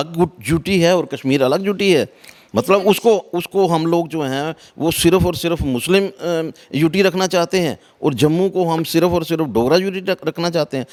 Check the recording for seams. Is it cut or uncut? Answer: uncut